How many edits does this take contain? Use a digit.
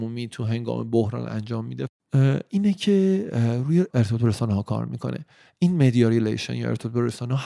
2